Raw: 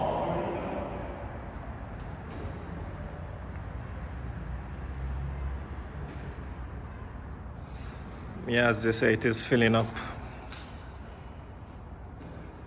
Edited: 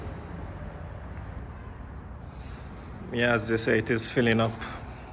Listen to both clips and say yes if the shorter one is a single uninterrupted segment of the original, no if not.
no